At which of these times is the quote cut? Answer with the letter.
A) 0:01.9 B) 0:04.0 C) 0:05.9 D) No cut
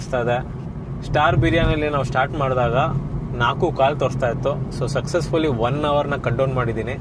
D